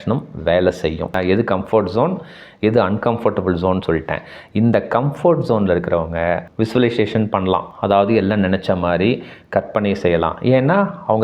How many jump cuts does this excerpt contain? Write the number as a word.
one